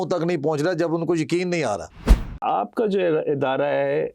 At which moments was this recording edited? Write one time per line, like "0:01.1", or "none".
0:02.4